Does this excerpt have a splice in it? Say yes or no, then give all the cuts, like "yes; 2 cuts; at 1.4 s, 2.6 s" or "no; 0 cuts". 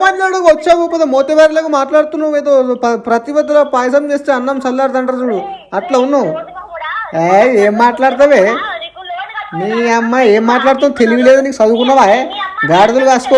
no; 0 cuts